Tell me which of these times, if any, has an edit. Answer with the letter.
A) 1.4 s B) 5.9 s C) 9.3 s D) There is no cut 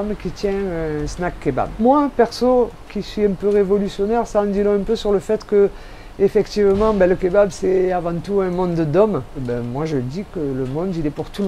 C